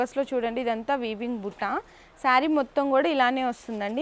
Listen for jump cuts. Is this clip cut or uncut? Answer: uncut